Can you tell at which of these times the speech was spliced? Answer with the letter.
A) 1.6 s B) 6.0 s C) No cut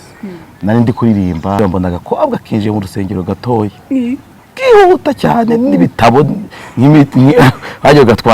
A